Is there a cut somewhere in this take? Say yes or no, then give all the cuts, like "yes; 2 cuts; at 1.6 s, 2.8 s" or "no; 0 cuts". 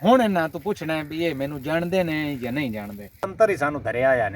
yes; 1 cut; at 3.2 s